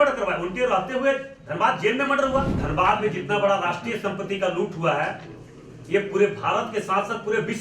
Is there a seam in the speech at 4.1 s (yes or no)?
no